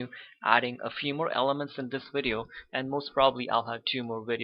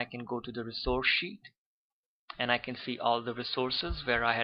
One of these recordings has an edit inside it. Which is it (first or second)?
second